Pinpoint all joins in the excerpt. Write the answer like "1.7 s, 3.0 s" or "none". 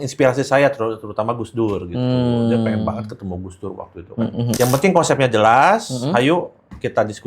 4.6 s